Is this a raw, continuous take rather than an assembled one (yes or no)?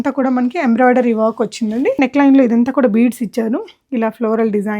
no